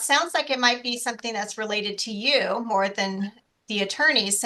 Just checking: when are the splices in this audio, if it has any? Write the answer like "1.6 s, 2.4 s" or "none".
none